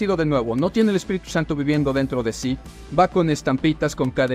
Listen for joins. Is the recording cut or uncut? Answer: cut